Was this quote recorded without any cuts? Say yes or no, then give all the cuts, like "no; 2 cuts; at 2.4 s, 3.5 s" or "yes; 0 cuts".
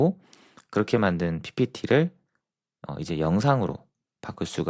yes; 0 cuts